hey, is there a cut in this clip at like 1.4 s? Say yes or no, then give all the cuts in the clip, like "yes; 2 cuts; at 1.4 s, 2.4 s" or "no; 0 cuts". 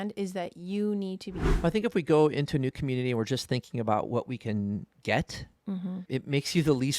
yes; 1 cut; at 1.4 s